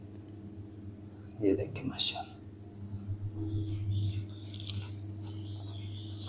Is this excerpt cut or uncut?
uncut